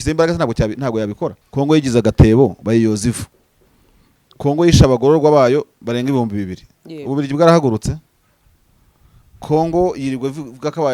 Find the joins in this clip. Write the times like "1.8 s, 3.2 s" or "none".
1.4 s